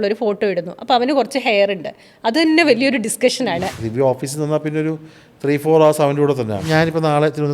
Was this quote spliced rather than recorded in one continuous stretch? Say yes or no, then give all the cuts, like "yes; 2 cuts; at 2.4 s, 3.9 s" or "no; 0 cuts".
yes; 2 cuts; at 3.8 s, 6.6 s